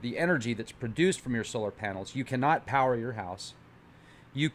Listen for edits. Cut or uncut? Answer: cut